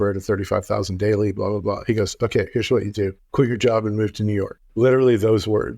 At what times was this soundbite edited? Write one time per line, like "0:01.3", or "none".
0:03.2
0:04.6

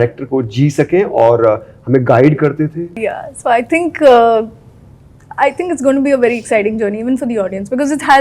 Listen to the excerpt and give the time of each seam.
0:02.9

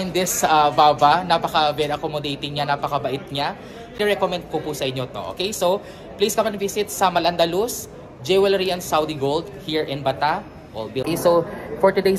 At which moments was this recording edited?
0:04.0
0:11.0

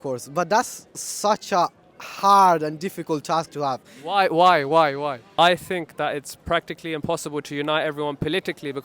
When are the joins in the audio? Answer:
0:05.3

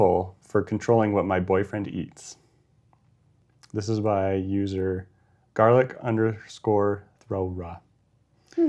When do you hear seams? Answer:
none

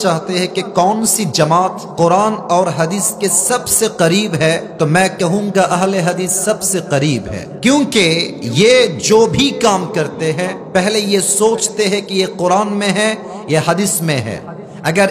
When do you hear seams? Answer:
0:01.8
0:04.7
0:07.4
0:08.4
0:10.6

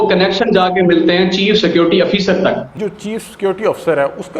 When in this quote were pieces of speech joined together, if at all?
0:02.8

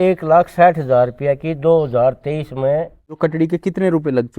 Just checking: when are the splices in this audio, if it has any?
0:03.1

